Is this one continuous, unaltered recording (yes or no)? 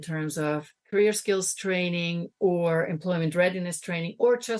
yes